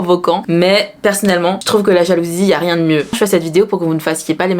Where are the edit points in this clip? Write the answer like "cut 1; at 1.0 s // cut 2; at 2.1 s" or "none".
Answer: cut 1; at 3.1 s